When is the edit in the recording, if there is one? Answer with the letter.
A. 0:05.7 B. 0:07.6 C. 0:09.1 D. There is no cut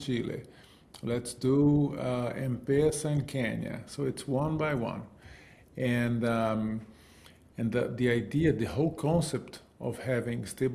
D